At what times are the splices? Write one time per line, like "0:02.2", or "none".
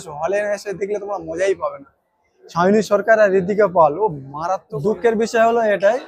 0:04.6